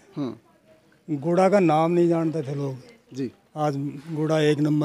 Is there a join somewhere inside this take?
no; 0 cuts

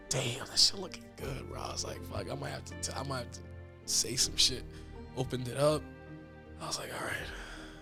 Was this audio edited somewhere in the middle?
no; 0 cuts

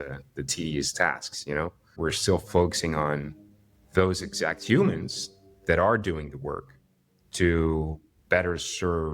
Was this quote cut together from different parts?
yes; 1 cut; at 1.8 s

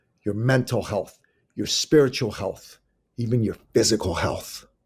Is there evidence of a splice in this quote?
no; 0 cuts

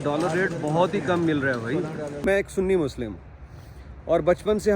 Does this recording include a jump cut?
yes; 1 cut; at 2.1 s

